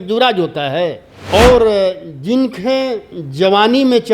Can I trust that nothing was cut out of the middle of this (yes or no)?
no